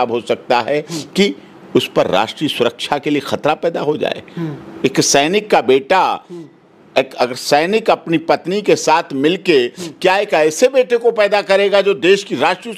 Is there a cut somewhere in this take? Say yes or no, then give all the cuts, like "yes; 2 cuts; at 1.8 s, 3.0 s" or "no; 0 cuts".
no; 0 cuts